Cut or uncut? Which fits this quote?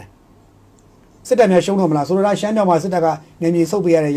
uncut